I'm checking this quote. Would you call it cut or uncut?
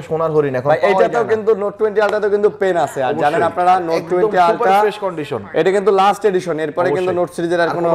uncut